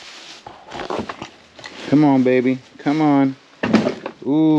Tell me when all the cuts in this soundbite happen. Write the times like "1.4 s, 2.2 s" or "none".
none

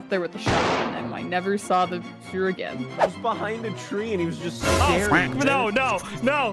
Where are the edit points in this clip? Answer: 3.0 s

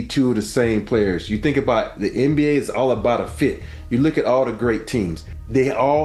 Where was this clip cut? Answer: none

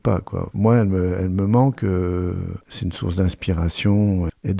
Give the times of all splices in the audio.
none

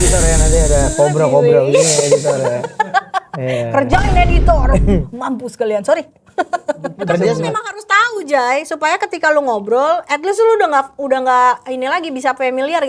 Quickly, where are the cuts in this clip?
7.4 s

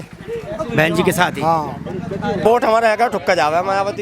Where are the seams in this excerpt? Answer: 2.4 s

